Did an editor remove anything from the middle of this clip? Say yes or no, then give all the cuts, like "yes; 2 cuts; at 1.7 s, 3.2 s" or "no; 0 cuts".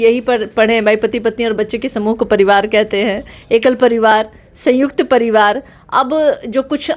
no; 0 cuts